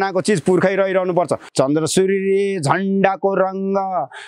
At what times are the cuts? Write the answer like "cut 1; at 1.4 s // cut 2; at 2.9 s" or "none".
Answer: cut 1; at 1.4 s